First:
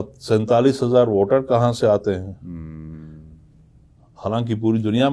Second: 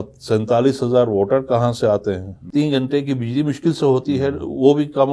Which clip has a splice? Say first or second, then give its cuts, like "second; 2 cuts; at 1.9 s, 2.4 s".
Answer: second; 1 cut; at 2.3 s